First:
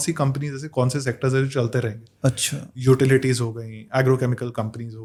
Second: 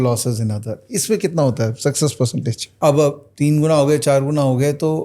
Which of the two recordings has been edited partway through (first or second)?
second